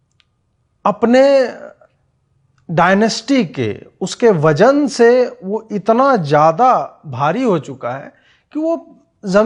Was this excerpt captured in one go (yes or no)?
yes